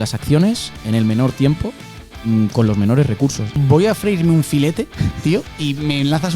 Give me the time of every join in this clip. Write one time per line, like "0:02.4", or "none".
0:03.5

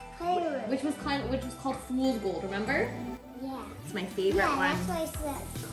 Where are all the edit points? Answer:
none

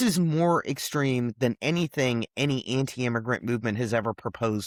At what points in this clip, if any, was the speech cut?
none

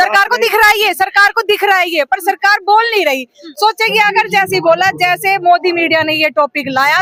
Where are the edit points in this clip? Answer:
none

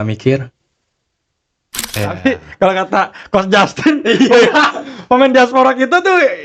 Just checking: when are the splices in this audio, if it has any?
0:01.9

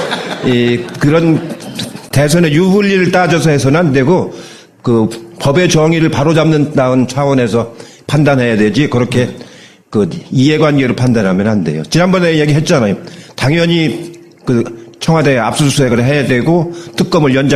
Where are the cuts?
0:02.0

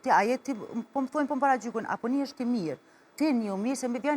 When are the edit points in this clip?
0:03.1

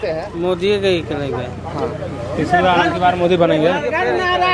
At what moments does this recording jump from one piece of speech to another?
none

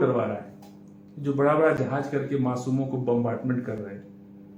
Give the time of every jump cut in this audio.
none

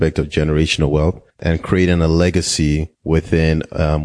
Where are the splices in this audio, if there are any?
0:01.4
0:02.9

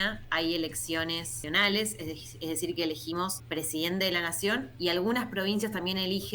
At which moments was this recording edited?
0:01.3
0:03.4

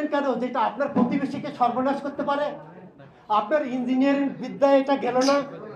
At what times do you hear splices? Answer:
none

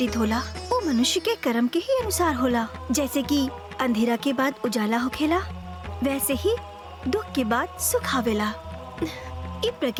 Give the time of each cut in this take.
none

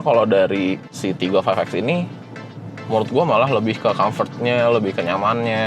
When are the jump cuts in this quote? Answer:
0:00.9

